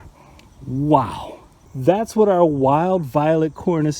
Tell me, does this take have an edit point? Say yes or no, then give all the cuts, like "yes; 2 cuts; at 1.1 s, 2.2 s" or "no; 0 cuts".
yes; 1 cut; at 1.5 s